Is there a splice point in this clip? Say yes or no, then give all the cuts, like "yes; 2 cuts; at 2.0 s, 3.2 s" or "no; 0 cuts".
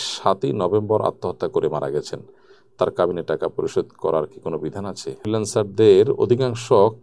yes; 1 cut; at 5.1 s